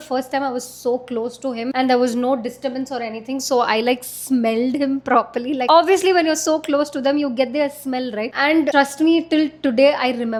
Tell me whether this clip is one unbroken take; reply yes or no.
yes